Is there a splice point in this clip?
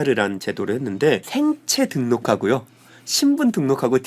yes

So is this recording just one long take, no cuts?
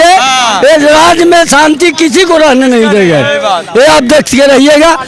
yes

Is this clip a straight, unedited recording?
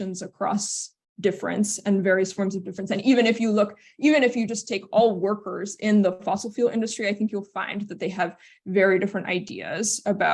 yes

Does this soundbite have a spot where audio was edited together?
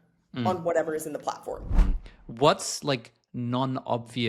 yes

